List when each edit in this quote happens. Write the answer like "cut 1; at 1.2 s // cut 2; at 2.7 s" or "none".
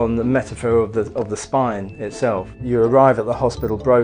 cut 1; at 2.6 s